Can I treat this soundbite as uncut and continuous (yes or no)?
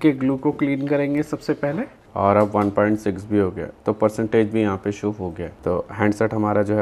no